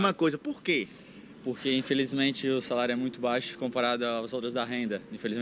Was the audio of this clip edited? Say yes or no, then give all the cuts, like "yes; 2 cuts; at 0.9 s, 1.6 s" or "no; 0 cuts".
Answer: no; 0 cuts